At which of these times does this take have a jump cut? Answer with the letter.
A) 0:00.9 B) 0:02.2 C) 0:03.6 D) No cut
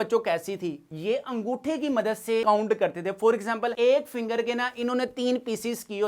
A